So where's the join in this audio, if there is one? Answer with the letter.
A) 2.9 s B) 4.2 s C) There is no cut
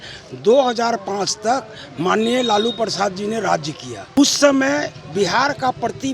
B